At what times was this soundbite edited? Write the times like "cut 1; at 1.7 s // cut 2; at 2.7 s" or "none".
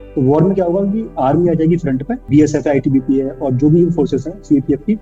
cut 1; at 2.2 s